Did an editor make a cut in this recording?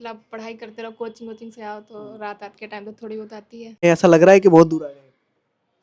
yes; 1 cut; at 3.8 s

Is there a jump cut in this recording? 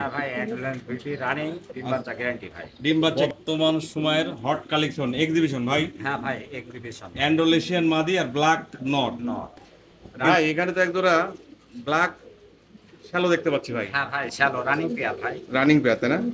yes; 2 cuts; at 3.1 s, 10.3 s

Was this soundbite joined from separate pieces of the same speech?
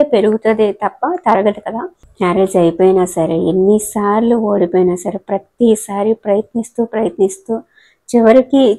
yes; 1 cut; at 2.0 s

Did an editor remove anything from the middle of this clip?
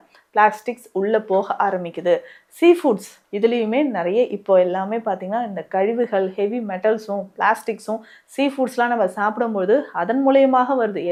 no; 0 cuts

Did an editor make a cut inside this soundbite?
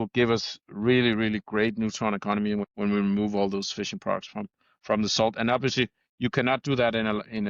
yes; 1 cut; at 2.7 s

